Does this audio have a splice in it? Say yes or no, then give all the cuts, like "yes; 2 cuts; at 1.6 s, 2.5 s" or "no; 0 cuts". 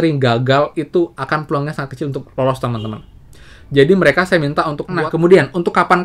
yes; 1 cut; at 4.8 s